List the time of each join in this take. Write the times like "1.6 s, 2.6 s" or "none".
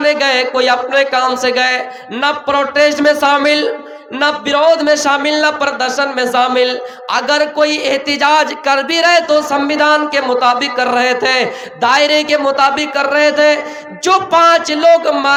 none